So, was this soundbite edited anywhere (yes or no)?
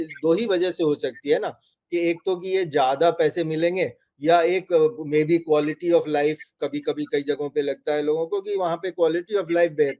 no